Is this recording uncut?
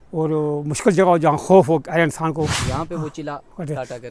no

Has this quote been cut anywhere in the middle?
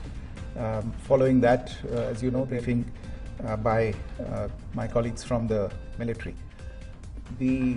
yes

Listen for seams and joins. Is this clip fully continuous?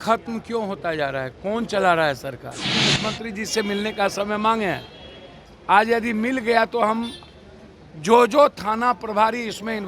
no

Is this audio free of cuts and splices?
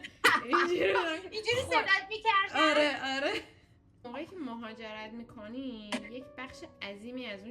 no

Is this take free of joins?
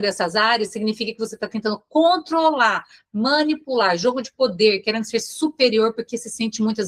yes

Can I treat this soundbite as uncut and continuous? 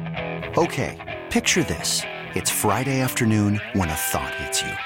yes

